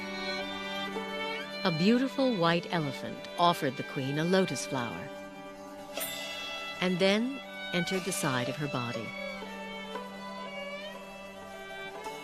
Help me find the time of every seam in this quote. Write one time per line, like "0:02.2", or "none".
0:05.6